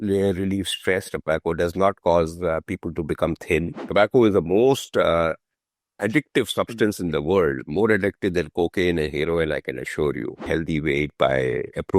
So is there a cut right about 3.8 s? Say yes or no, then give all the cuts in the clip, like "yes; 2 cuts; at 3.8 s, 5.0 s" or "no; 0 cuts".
yes; 2 cuts; at 3.8 s, 10.5 s